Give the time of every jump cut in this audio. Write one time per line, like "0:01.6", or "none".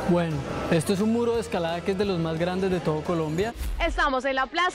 0:03.5